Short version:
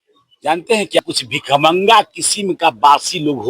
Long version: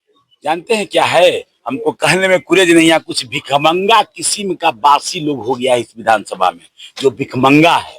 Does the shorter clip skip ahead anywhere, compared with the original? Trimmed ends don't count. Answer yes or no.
yes